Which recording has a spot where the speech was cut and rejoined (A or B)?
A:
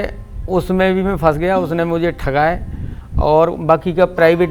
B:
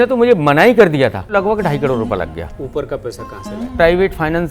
B